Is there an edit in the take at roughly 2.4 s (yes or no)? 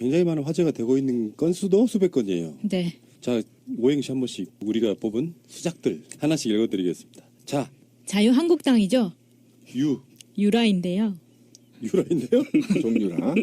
yes